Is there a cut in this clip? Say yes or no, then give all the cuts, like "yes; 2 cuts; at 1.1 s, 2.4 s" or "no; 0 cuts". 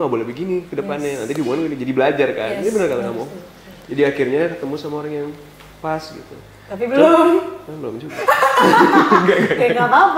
no; 0 cuts